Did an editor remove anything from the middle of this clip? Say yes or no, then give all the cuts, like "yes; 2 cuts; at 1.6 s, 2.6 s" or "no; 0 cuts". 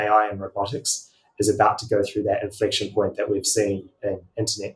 no; 0 cuts